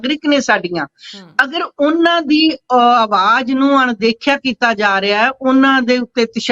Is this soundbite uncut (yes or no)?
yes